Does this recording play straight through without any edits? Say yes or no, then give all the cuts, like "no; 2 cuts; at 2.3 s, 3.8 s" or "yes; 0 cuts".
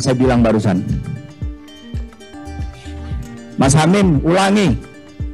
no; 1 cut; at 2.4 s